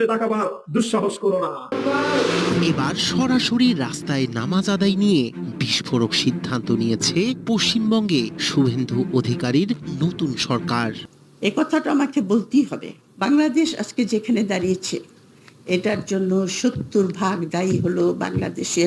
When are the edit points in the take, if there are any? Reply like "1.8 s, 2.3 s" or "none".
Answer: 1.7 s, 11.0 s